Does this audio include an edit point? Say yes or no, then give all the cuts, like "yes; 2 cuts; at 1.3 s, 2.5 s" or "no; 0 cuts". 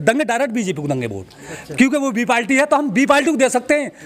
no; 0 cuts